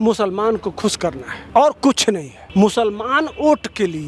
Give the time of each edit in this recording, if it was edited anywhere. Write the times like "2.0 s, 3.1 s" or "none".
1.3 s, 2.3 s